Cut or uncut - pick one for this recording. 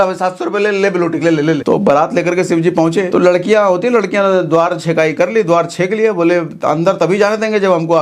cut